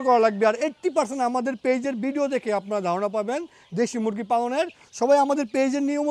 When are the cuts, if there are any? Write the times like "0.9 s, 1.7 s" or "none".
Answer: none